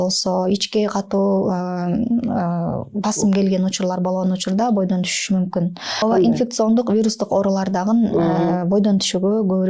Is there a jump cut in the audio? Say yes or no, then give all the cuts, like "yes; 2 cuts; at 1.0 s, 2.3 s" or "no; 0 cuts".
yes; 1 cut; at 6.0 s